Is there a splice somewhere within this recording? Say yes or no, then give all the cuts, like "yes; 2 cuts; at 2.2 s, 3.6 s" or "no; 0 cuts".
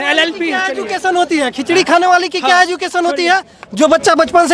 no; 0 cuts